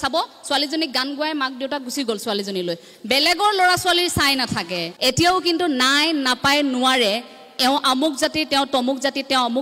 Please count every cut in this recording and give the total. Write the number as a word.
one